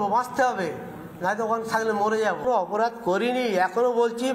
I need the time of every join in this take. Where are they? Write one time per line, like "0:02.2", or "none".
0:02.4